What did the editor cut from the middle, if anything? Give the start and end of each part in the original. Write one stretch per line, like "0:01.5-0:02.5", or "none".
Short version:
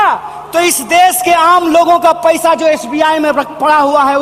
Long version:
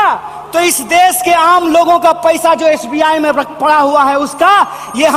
none